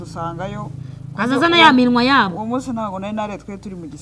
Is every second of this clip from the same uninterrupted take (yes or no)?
yes